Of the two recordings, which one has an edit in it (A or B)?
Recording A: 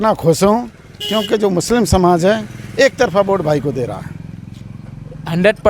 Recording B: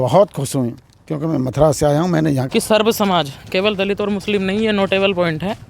B